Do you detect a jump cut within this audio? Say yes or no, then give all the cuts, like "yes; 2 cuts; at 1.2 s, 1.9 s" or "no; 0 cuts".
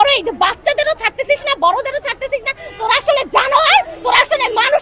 no; 0 cuts